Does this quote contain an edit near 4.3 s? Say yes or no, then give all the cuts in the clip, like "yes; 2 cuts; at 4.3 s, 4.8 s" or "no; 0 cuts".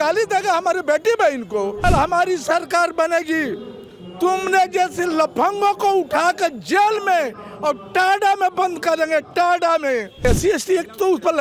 no; 2 cuts; at 1.8 s, 10.2 s